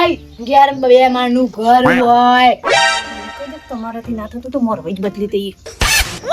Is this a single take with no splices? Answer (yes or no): yes